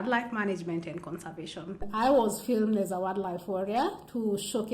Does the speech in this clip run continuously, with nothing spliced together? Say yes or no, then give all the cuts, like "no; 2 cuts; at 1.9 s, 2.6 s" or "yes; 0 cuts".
no; 1 cut; at 1.9 s